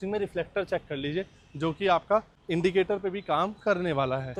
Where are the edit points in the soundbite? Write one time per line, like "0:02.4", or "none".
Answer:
none